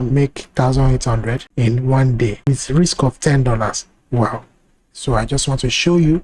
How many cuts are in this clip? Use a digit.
3